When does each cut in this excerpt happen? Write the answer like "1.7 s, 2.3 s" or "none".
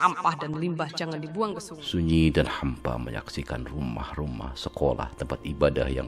1.7 s